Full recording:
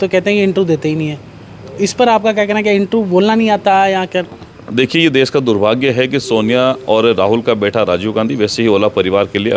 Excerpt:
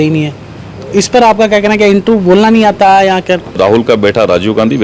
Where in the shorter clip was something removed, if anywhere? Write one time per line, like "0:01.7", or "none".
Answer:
0:03.6